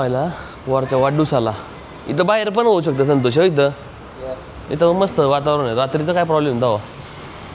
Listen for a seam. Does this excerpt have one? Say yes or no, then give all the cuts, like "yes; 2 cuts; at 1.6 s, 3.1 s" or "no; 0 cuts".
no; 0 cuts